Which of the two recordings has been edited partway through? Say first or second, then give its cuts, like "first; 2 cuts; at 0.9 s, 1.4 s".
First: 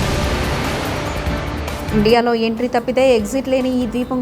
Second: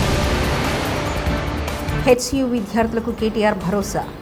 first; 1 cut; at 1.8 s